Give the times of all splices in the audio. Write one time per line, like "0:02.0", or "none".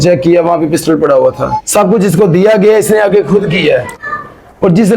0:01.7
0:04.0

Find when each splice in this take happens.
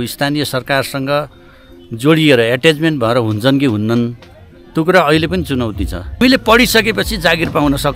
0:06.2

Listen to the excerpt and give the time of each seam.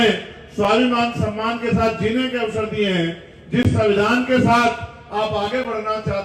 none

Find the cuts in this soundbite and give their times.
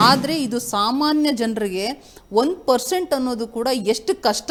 none

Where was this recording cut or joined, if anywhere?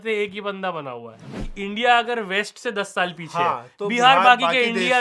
0:01.4

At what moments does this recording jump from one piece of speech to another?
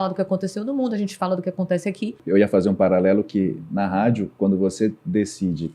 0:02.2

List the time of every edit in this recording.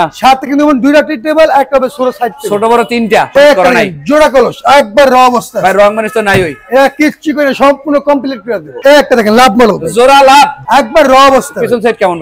0:03.3
0:08.7
0:10.6

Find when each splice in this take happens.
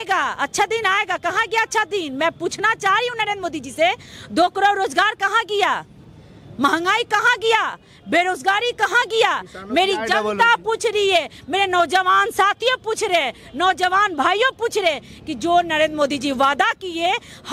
none

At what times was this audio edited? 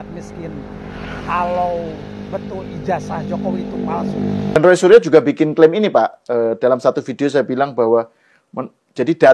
0:04.6

